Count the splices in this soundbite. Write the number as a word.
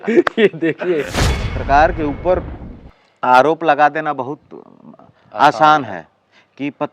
one